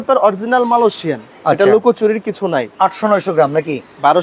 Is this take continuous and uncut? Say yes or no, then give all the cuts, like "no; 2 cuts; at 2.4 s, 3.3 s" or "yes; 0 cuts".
no; 1 cut; at 2.7 s